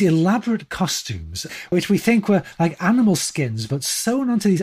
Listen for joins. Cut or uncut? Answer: cut